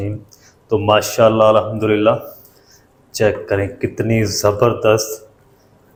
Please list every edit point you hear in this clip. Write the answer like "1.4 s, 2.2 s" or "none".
none

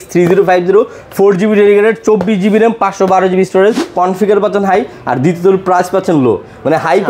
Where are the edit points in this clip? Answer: 3.9 s

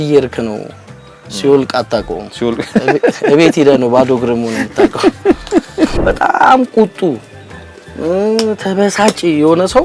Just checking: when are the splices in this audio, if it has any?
6.0 s

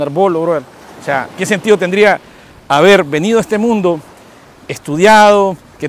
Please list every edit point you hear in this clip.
none

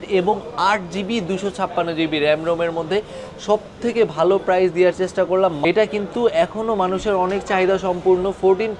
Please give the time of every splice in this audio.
5.6 s

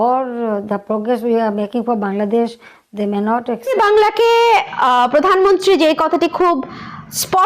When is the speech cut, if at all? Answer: 3.7 s

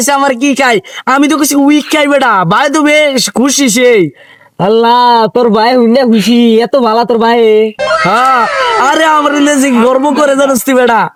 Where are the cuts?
none

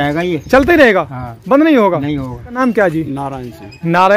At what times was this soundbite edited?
2.6 s

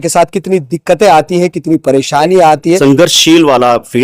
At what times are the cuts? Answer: 2.8 s

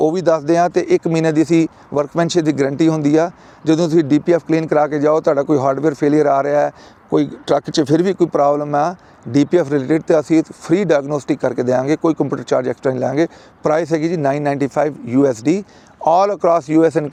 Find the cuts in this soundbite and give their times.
none

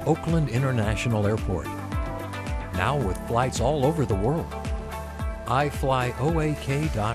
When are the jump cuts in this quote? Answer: none

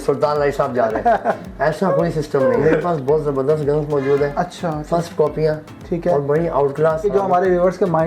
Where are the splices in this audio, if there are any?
2.6 s, 7.0 s

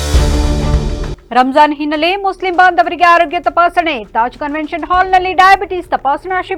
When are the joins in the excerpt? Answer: none

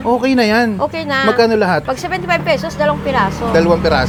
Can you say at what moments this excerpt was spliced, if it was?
none

